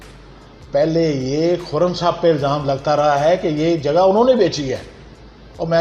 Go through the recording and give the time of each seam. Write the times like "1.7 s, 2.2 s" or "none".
none